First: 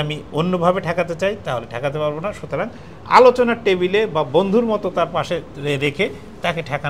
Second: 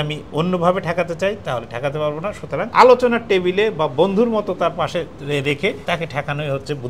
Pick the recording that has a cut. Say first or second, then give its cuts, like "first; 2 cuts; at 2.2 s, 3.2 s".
second; 2 cuts; at 2.7 s, 5.8 s